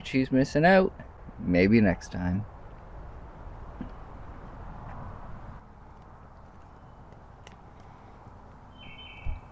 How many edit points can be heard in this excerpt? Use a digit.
0